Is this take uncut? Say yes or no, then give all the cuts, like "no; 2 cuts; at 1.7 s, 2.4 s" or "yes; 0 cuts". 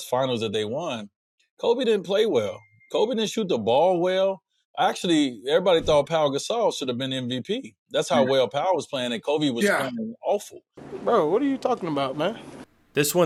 yes; 0 cuts